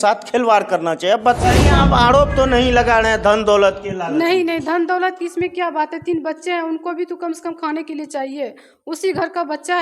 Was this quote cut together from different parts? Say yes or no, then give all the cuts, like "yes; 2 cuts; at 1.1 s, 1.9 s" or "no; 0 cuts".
yes; 1 cut; at 1.4 s